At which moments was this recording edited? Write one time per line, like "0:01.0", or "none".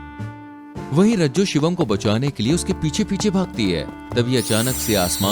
0:00.9